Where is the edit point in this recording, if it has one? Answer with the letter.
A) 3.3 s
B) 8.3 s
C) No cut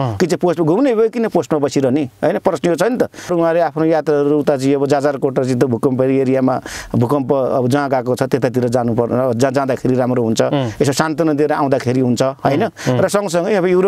A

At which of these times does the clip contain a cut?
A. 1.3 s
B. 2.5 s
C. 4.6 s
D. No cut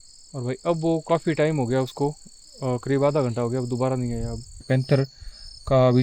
C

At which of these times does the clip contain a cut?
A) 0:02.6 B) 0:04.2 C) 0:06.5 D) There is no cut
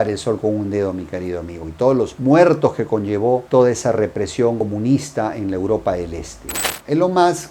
C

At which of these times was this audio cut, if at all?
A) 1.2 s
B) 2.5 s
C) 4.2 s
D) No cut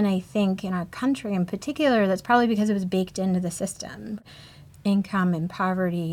C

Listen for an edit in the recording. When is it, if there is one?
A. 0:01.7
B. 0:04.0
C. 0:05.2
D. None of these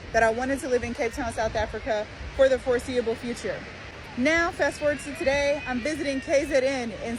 D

